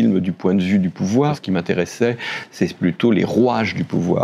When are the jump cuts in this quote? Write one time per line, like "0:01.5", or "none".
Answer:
0:01.4